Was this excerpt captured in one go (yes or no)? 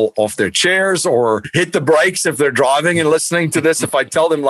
no